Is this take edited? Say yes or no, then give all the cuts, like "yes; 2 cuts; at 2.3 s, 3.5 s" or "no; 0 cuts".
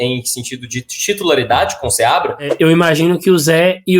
yes; 1 cut; at 2.5 s